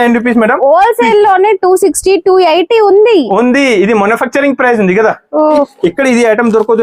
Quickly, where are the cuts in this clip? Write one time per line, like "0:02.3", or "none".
0:05.7